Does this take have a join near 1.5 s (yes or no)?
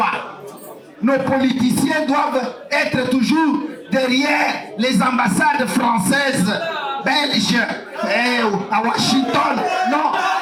no